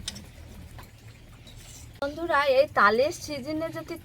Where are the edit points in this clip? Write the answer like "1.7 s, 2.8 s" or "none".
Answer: 2.1 s